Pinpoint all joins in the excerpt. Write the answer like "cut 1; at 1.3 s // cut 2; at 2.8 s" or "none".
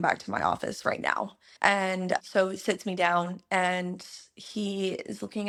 none